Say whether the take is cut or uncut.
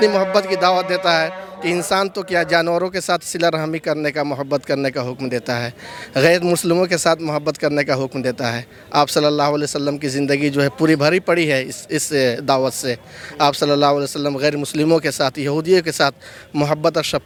uncut